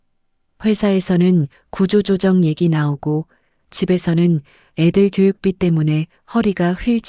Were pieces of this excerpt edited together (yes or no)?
no